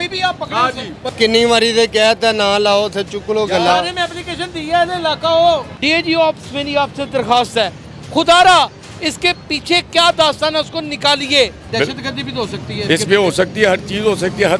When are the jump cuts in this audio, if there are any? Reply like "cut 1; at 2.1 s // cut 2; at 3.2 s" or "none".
cut 1; at 1.0 s // cut 2; at 5.7 s // cut 3; at 11.6 s